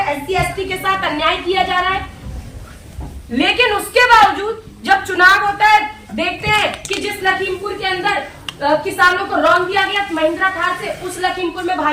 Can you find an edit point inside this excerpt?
no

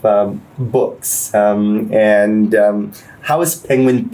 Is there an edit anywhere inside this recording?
no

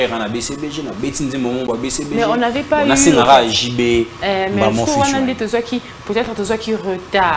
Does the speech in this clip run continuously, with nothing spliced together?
yes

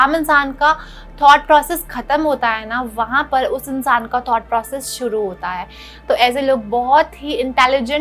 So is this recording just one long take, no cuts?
yes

